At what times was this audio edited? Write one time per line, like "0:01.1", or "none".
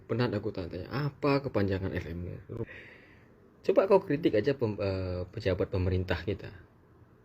0:02.6